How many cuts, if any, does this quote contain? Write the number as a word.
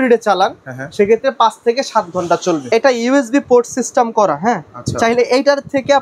one